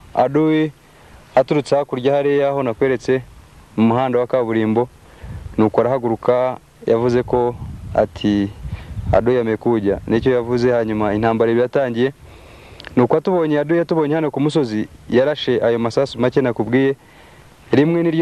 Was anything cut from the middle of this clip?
no; 0 cuts

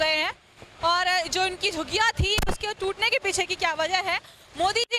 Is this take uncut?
yes; 0 cuts

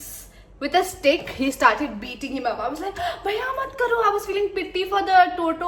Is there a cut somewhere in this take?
no; 0 cuts

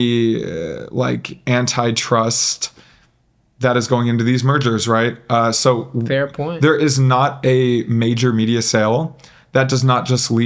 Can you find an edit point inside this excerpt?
no; 0 cuts

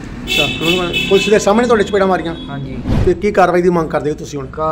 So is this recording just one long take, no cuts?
no; 1 cut; at 3.0 s

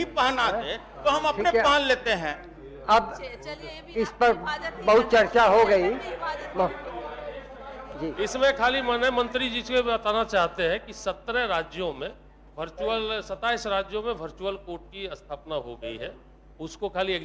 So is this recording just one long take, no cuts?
yes; 0 cuts

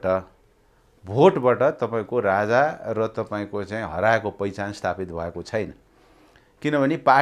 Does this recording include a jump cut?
no; 0 cuts

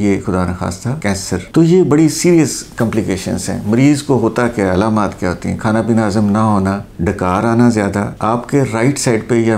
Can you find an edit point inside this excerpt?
yes; 1 cut; at 1.4 s

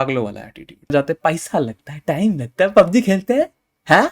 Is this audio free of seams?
no; 1 cut; at 0.9 s

